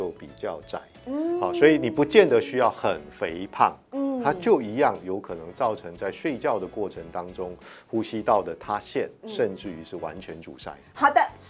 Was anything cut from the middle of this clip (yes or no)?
no